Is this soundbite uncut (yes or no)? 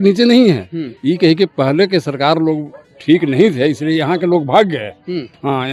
yes